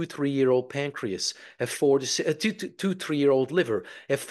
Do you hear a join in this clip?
no; 0 cuts

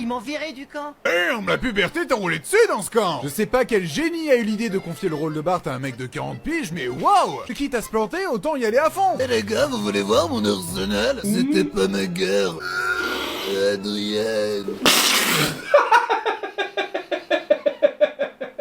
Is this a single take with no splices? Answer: no; 4 cuts; at 1.1 s, 7.5 s, 9.2 s, 12.7 s

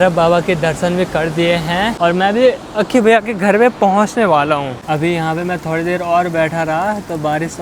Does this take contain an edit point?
yes; 2 cuts; at 1.9 s, 4.7 s

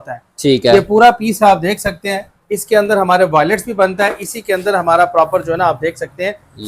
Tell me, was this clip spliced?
no; 0 cuts

